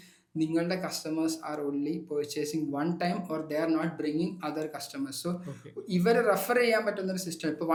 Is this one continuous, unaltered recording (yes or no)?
yes